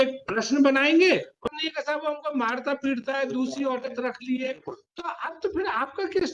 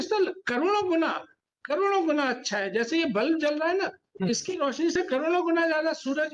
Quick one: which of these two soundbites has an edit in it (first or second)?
first